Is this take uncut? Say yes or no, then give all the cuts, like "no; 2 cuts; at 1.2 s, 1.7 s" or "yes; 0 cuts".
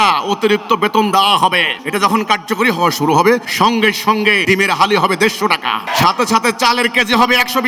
no; 4 cuts; at 1.8 s, 3.5 s, 4.4 s, 5.9 s